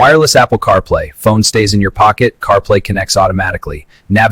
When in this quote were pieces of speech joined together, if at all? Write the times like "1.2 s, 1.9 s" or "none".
none